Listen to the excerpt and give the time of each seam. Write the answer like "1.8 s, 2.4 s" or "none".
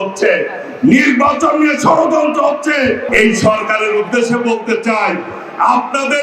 3.0 s